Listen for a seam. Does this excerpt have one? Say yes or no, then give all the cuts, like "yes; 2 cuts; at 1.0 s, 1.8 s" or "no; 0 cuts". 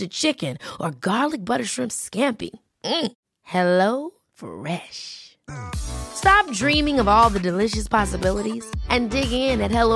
no; 0 cuts